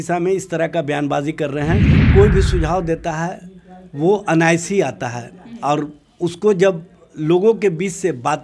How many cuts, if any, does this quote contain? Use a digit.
1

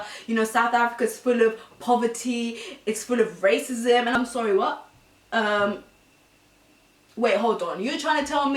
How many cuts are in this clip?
0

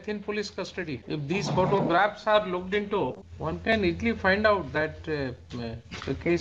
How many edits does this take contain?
2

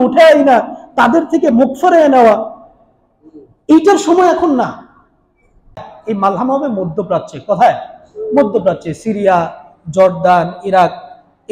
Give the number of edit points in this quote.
1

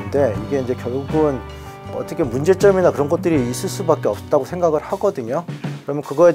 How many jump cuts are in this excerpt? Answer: 1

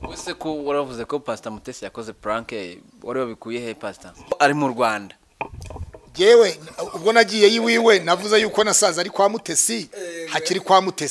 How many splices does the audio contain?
1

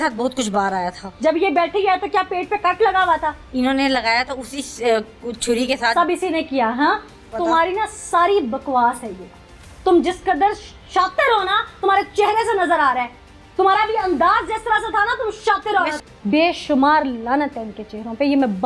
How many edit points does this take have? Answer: 2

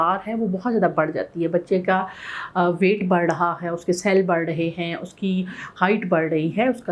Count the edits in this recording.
0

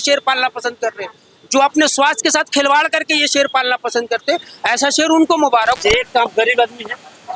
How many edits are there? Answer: 0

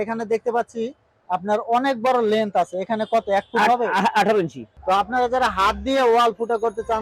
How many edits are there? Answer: 1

